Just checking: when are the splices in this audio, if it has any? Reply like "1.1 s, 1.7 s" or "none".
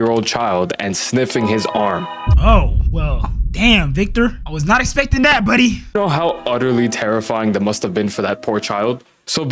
none